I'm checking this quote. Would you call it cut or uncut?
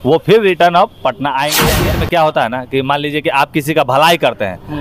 cut